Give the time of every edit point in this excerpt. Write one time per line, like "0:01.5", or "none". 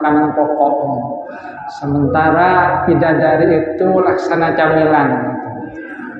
none